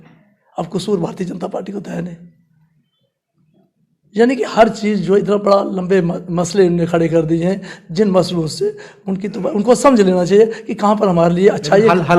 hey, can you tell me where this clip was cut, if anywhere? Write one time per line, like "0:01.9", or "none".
none